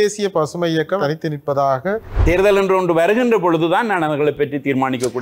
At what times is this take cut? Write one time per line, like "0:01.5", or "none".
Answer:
0:01.0
0:02.1